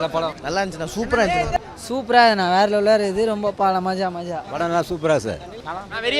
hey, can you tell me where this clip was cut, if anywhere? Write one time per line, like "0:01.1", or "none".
0:01.6
0:04.4